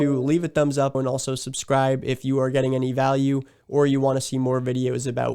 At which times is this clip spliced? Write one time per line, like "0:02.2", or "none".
0:01.0